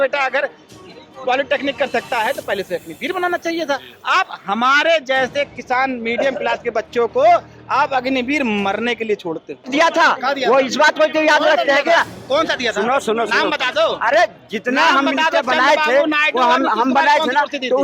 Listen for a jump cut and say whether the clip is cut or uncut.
cut